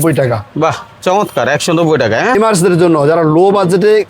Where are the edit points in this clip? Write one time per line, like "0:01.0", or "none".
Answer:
0:02.4